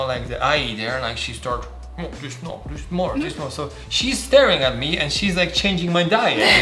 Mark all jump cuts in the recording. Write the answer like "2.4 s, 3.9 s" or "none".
none